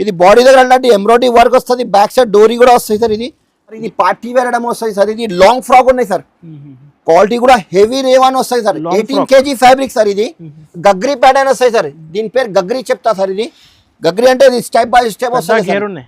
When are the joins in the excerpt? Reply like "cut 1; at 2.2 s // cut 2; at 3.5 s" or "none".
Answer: cut 1; at 3.8 s